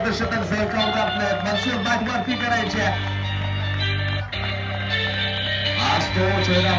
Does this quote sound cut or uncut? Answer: uncut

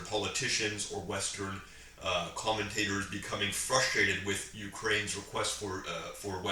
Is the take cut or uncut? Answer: uncut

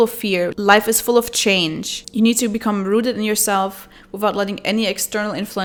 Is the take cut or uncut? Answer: uncut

